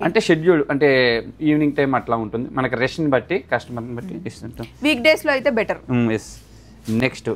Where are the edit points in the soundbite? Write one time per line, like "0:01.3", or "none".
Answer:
none